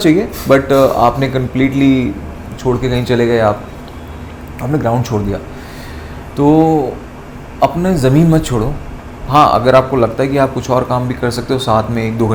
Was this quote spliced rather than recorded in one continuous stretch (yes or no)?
no